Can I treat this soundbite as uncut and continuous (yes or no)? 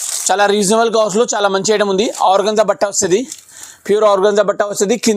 yes